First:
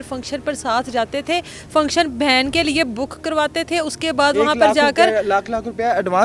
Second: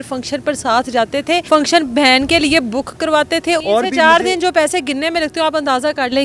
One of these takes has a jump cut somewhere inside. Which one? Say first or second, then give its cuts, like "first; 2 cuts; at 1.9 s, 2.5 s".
second; 2 cuts; at 1.4 s, 3.6 s